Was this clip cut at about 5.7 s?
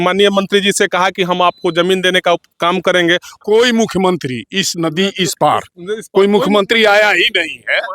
no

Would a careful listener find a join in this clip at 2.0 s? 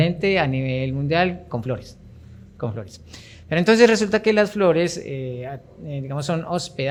no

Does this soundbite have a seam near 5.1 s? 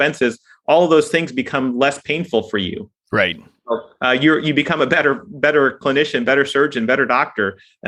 no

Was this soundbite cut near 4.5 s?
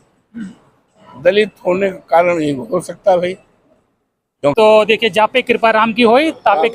yes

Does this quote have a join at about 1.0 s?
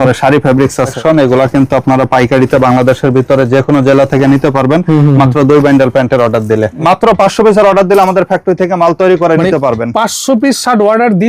yes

